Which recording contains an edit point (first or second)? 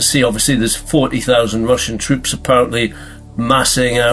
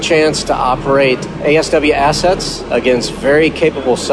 second